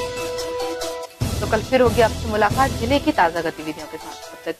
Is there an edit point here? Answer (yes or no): no